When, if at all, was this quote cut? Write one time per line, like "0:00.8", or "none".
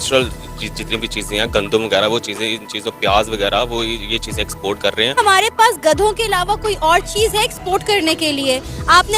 0:05.2